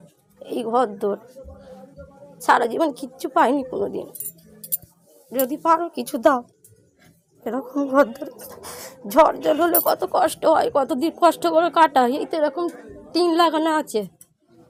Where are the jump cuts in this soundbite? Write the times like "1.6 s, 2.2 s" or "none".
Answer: none